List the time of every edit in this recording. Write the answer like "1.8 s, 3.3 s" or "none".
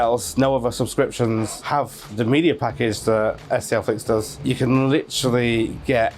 4.3 s